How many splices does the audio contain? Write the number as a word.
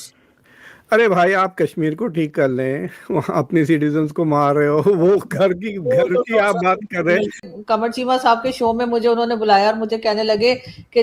one